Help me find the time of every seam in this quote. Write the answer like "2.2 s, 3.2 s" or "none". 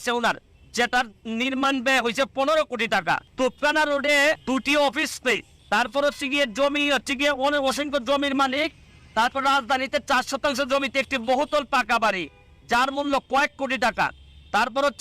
3.3 s, 4.4 s, 5.5 s

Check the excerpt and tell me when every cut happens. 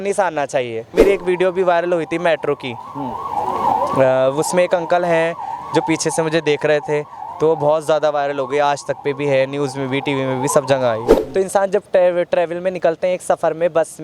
1.0 s, 11.1 s

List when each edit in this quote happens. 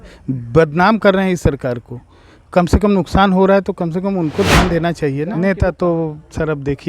5.3 s

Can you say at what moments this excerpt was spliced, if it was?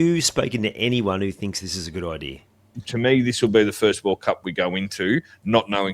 2.8 s

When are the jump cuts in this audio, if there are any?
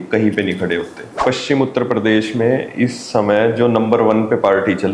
1.2 s

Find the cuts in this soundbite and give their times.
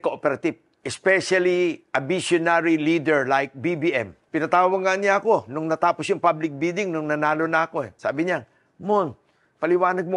7.9 s

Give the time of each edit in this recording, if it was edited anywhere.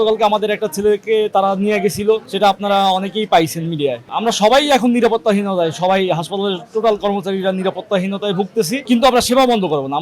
2.3 s, 4.0 s, 8.8 s

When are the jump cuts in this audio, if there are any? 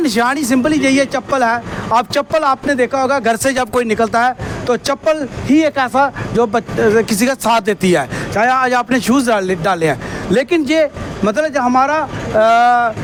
none

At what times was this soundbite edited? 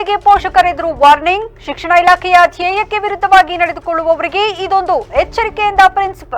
none

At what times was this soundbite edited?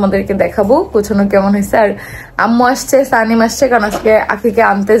none

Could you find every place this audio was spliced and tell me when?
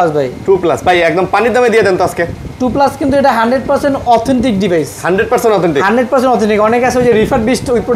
none

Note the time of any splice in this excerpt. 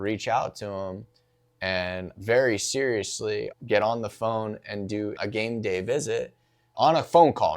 2.1 s, 3.5 s, 5.2 s, 6.7 s

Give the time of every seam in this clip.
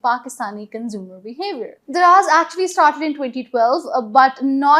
1.8 s

